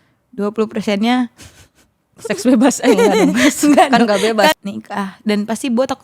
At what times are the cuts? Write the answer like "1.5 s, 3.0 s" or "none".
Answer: 4.5 s